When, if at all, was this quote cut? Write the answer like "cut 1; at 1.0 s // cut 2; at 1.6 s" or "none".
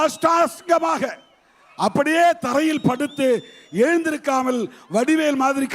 none